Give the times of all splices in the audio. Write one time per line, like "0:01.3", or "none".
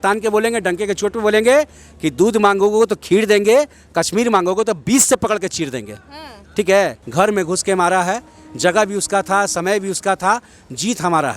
0:07.0

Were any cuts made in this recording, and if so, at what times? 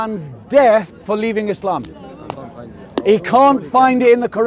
0:00.9

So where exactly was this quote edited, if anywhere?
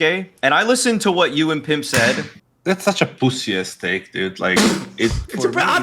0:02.3

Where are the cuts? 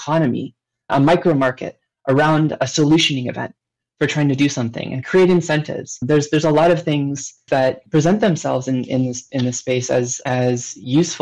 none

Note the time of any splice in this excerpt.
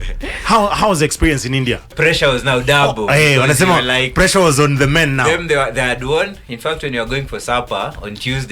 0:01.9

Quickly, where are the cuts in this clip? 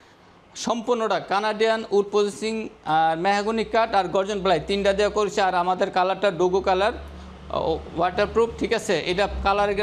none

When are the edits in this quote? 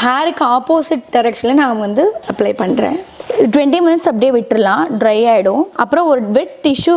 0:02.2
0:05.8

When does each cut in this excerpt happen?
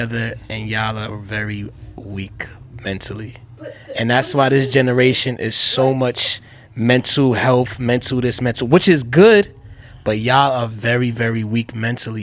none

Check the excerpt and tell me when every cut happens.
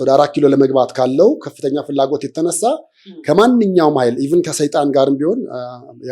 none

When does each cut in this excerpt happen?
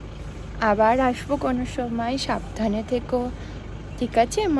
none

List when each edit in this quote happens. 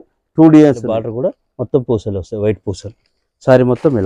0:01.1

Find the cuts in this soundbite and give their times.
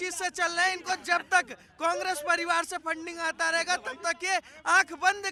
none

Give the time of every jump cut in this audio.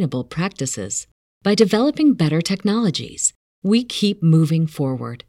none

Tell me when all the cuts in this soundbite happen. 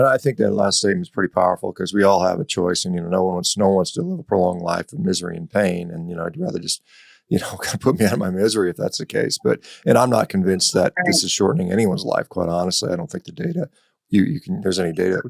none

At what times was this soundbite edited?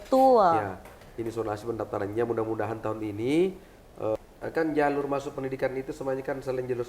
0:04.2

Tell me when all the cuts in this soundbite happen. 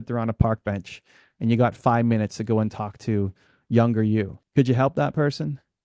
0:04.4

